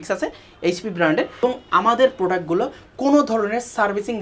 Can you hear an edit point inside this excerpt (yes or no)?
yes